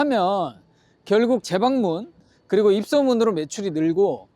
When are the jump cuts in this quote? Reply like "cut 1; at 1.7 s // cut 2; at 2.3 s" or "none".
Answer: cut 1; at 1.5 s